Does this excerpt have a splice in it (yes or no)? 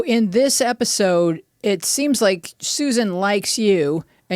yes